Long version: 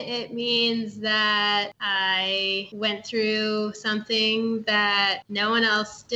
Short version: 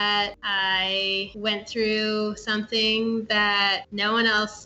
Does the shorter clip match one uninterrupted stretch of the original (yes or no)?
yes